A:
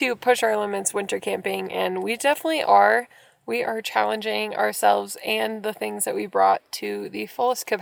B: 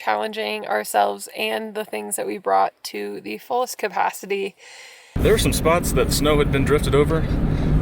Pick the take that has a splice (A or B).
B